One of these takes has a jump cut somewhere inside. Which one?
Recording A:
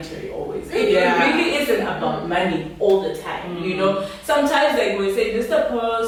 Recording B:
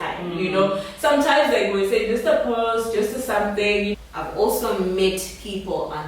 B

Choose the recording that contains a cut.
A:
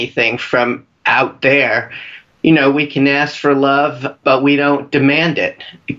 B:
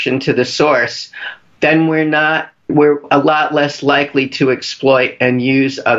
B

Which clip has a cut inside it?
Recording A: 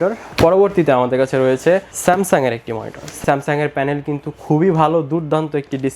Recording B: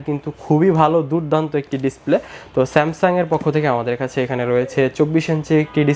A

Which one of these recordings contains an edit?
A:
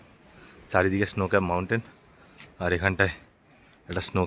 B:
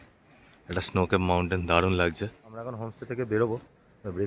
B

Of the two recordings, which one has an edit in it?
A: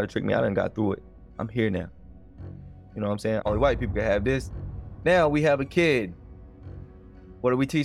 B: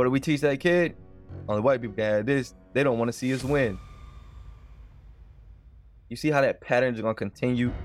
A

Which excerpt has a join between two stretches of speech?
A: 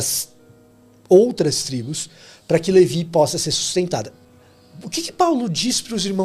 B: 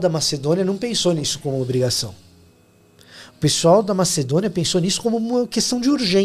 A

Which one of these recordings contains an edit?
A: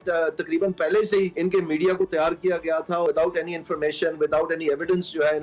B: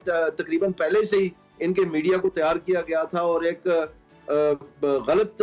A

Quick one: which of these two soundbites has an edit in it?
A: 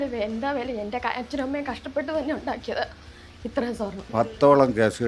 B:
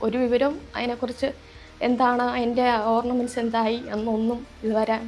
A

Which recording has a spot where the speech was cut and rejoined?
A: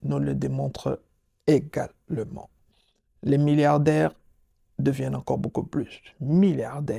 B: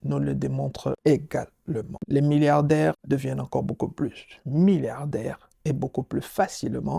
B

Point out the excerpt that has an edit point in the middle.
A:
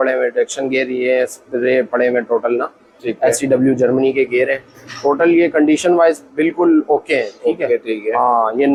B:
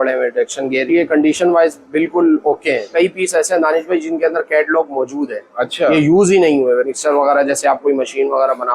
B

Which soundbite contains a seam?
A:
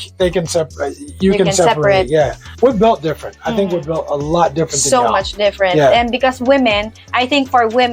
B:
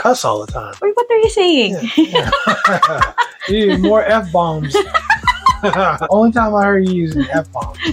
B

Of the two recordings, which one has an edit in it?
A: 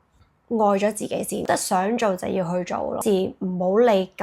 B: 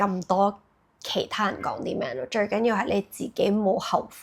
A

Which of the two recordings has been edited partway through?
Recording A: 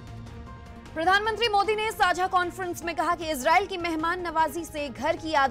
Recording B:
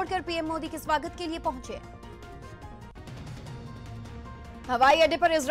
A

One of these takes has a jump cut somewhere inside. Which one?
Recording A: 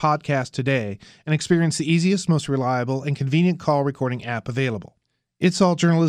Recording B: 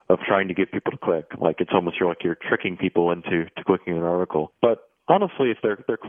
B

